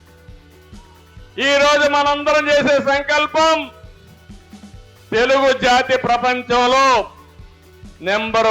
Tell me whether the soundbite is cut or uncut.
cut